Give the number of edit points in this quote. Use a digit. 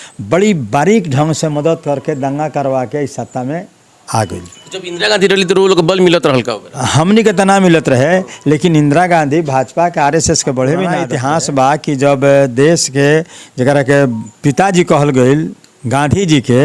1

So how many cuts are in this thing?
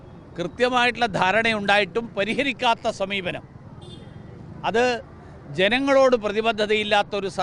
0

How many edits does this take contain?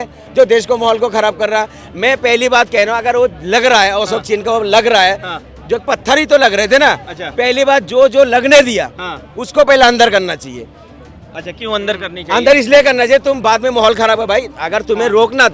0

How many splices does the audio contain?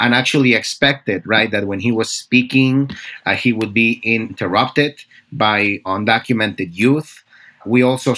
2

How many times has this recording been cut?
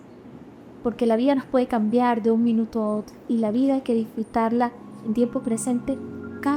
0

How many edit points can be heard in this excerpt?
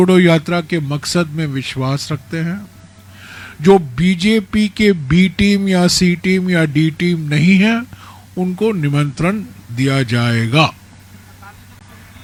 0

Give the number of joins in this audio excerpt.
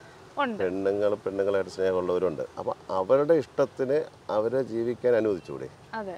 1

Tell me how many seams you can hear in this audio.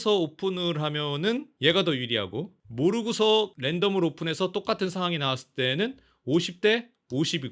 0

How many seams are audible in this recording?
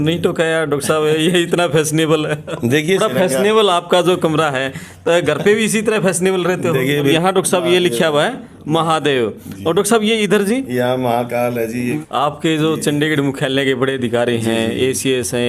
3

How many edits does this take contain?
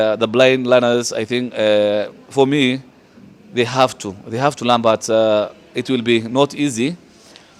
0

